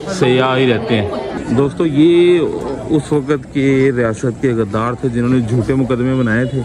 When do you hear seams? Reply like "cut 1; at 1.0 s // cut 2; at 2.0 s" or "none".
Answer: cut 1; at 1.3 s